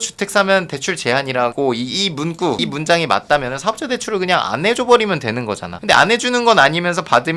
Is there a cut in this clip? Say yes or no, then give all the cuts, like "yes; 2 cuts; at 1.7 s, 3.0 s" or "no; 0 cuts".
no; 0 cuts